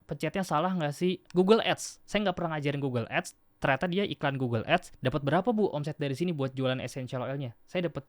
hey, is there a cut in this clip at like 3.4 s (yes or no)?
no